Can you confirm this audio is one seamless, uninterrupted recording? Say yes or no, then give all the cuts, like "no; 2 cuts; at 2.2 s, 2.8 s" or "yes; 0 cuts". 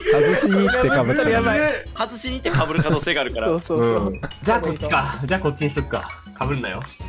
no; 2 cuts; at 1.9 s, 4.4 s